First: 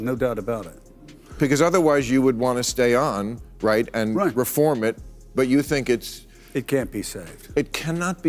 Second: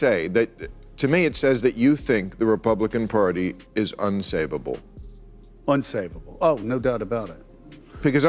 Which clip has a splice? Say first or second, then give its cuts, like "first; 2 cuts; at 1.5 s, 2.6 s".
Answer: second; 1 cut; at 5.2 s